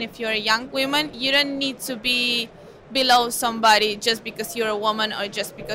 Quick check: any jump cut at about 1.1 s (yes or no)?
yes